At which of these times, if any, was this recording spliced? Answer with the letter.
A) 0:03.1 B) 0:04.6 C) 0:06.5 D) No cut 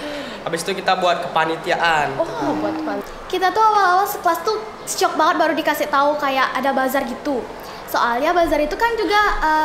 A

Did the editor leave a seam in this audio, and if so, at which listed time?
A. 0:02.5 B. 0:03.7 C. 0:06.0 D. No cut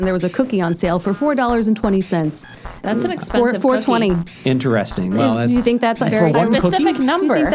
D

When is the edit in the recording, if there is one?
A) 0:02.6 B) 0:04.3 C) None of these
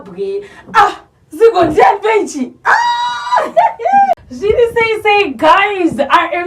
B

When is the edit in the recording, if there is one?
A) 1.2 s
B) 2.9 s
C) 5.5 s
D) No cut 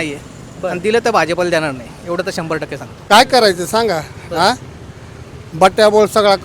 B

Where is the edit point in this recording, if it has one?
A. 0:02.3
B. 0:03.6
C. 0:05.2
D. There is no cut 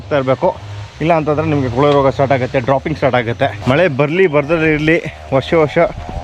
B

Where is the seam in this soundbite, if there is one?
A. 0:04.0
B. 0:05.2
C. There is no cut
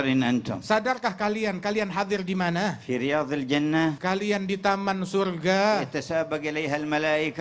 A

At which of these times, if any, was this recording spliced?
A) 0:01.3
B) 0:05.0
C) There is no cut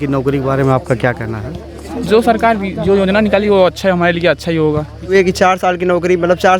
B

